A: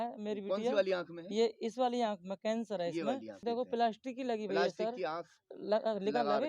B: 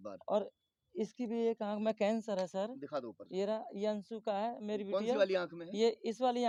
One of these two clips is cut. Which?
A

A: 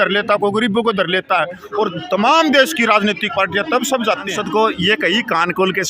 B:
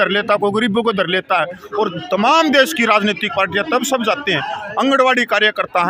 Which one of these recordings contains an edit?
A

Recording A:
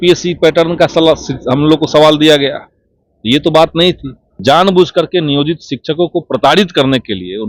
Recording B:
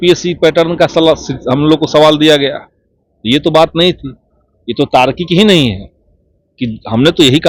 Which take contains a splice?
A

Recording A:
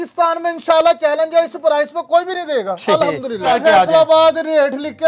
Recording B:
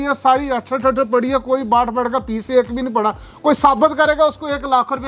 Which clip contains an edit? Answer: A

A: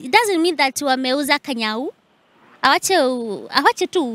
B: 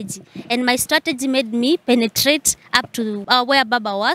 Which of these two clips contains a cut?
B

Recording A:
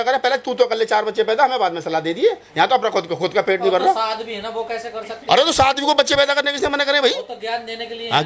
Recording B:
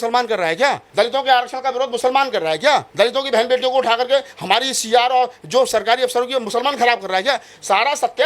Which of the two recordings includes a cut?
B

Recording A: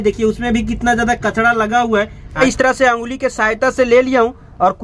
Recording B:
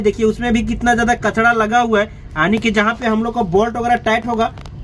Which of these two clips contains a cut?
A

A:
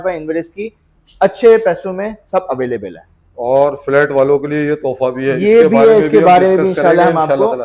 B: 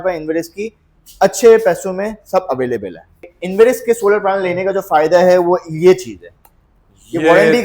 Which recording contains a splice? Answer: B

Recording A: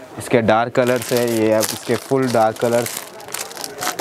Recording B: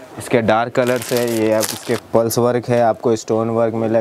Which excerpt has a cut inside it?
B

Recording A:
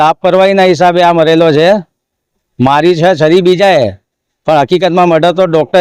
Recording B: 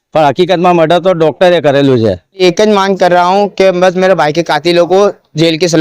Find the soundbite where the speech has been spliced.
B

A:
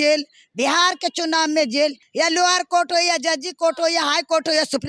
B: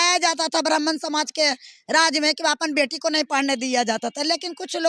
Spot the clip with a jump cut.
A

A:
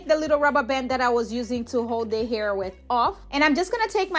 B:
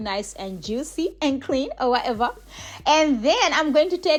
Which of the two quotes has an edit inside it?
A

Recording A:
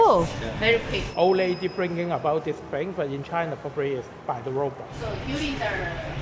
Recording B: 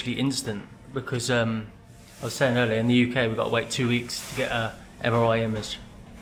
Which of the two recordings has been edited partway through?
A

